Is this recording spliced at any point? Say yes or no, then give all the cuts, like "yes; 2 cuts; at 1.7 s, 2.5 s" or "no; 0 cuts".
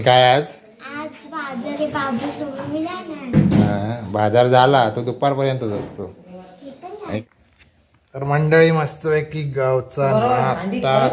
yes; 1 cut; at 7.2 s